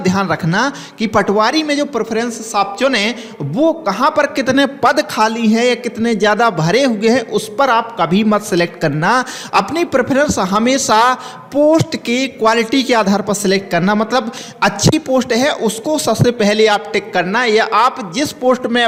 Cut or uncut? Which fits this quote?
uncut